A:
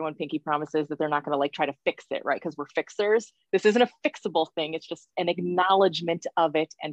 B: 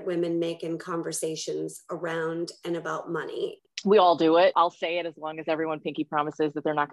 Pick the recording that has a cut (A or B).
B